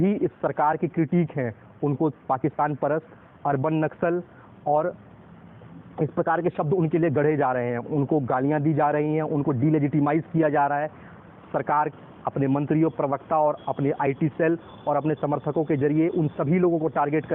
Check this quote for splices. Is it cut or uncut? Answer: uncut